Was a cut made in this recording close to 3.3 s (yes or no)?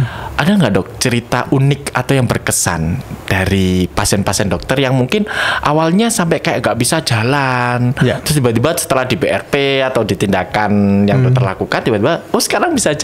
no